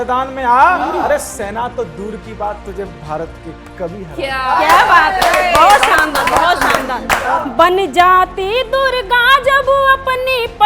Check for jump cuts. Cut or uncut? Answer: cut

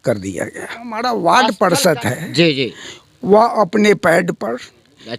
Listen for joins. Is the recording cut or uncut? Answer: cut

